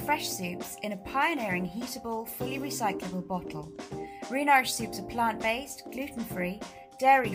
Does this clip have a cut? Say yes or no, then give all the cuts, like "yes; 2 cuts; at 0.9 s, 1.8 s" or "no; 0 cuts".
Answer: no; 0 cuts